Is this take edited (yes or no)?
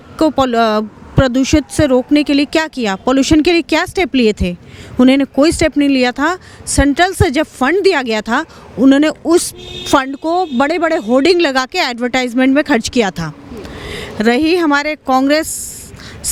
no